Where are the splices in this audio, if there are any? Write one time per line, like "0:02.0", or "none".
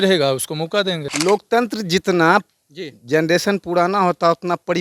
0:01.1